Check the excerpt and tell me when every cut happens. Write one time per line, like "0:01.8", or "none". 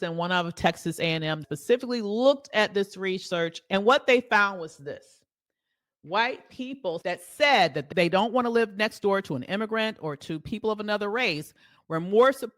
0:01.4
0:03.6